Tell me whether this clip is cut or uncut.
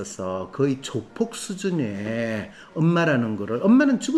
uncut